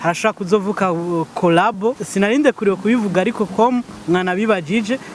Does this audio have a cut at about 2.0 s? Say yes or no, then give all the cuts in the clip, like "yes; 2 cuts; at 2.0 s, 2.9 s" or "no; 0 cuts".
yes; 1 cut; at 2.0 s